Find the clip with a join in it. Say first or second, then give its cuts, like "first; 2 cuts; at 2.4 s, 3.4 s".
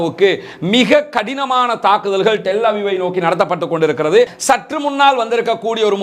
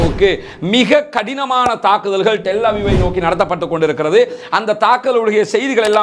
first; 1 cut; at 4.4 s